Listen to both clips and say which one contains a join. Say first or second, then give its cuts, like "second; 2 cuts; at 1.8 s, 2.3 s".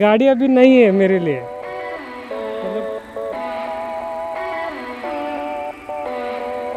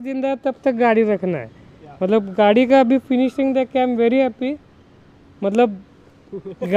first; 1 cut; at 1.4 s